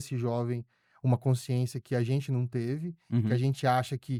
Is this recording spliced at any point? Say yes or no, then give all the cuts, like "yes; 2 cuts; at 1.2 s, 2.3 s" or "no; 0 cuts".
no; 0 cuts